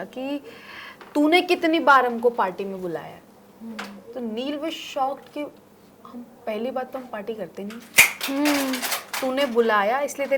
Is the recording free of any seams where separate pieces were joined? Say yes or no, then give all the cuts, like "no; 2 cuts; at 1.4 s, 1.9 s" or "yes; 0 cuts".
yes; 0 cuts